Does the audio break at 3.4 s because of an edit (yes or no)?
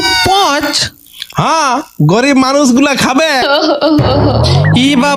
yes